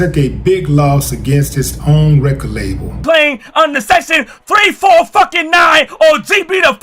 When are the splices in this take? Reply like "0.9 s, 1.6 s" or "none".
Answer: 3.0 s